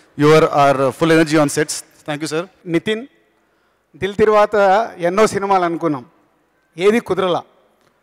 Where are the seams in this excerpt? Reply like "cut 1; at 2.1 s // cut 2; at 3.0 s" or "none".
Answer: cut 1; at 2.6 s

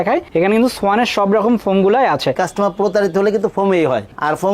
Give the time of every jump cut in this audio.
cut 1; at 2.4 s

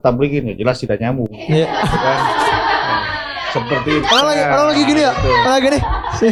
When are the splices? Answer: none

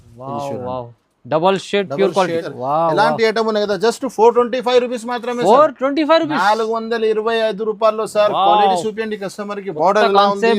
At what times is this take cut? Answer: cut 1; at 2.5 s

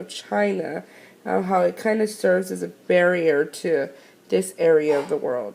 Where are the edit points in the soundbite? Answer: cut 1; at 2.1 s

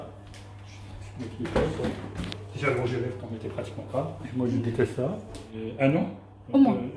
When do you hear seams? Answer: cut 1; at 5.4 s

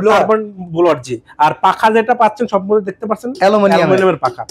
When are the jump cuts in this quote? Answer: none

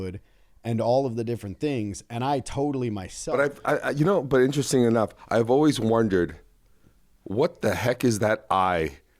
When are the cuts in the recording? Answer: cut 1; at 3.1 s

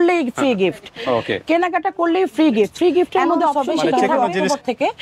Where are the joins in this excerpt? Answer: cut 1; at 4.0 s

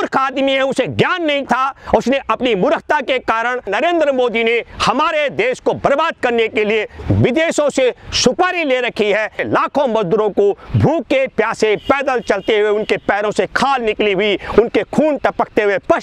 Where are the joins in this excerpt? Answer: cut 1; at 3.7 s // cut 2; at 9.4 s

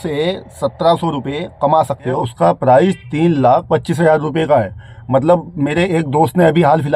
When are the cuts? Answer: cut 1; at 2.1 s

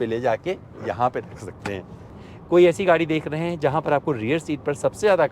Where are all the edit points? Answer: cut 1; at 2.2 s

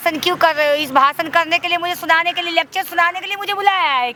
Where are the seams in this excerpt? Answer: none

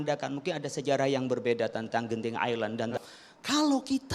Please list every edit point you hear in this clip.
cut 1; at 3.0 s

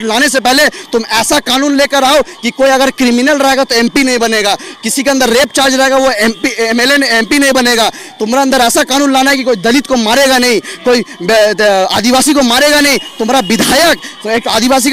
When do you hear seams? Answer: none

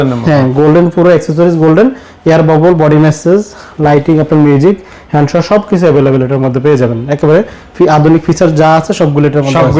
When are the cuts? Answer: none

